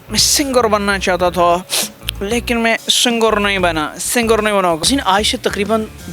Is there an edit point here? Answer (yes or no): yes